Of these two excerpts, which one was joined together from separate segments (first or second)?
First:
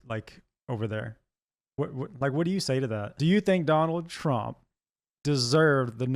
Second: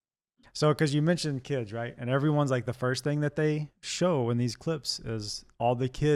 first